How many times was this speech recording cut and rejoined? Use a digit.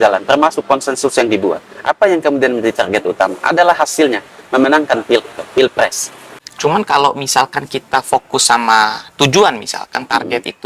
1